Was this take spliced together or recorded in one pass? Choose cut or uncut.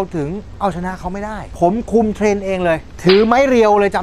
cut